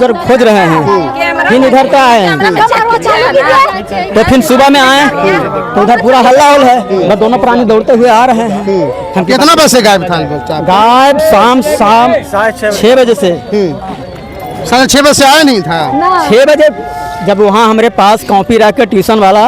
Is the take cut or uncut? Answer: uncut